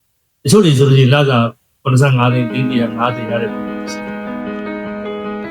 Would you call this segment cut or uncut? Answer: cut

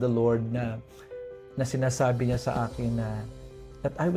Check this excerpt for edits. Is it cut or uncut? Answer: uncut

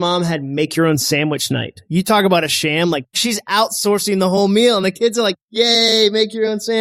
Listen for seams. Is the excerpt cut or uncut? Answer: cut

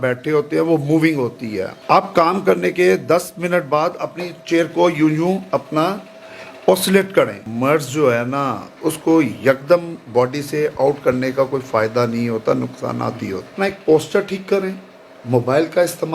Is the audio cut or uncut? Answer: cut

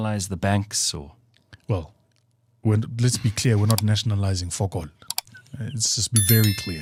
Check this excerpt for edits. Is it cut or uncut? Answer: uncut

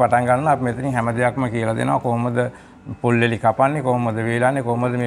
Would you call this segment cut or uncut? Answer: uncut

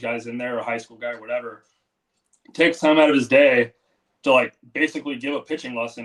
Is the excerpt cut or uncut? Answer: uncut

